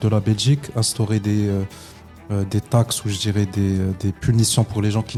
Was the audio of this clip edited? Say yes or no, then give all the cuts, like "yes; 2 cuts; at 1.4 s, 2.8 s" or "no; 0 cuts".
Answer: no; 0 cuts